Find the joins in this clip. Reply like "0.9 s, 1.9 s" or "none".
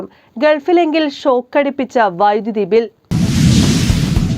3.0 s